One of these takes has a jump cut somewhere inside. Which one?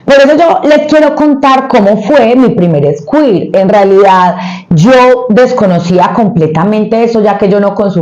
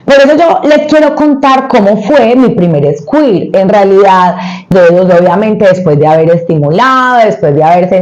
second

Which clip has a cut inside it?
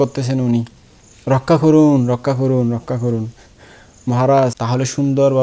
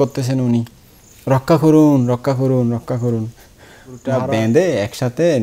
second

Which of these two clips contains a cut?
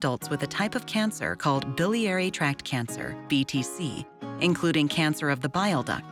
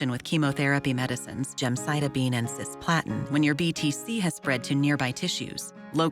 second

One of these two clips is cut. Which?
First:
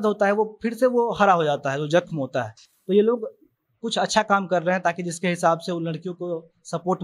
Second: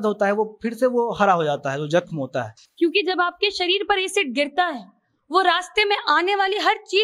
second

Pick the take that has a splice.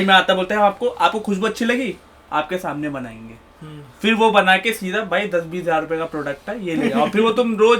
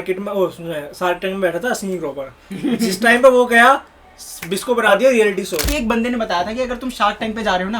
second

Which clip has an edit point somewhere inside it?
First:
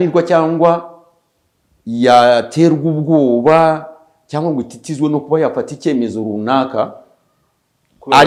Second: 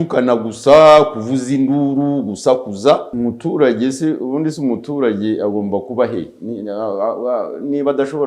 second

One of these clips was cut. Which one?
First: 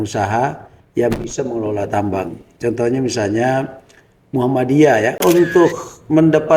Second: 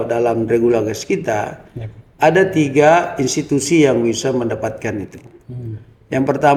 first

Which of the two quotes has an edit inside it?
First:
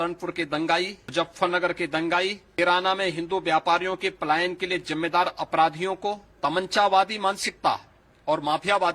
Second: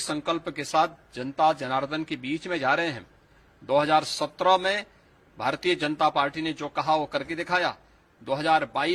first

